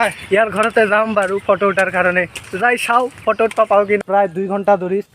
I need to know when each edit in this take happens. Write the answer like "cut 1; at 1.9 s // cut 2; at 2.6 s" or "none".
cut 1; at 4.0 s